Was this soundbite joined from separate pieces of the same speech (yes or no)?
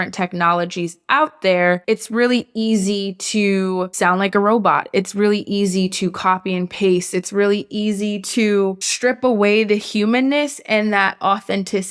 yes